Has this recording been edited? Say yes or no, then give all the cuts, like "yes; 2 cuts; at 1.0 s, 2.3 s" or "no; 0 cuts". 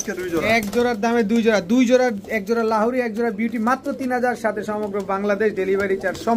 no; 0 cuts